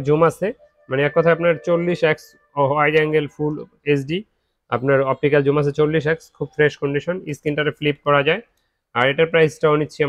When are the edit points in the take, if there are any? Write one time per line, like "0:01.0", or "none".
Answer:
none